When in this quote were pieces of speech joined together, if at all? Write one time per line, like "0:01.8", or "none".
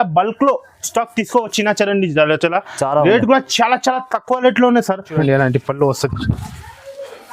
0:05.1